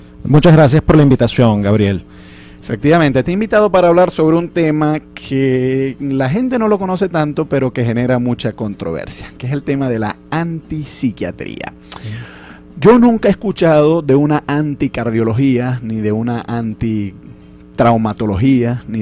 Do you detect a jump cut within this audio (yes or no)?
yes